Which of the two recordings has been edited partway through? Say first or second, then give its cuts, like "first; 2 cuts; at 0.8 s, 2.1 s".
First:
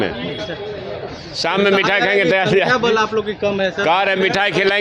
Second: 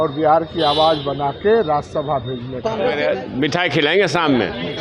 second; 1 cut; at 3.0 s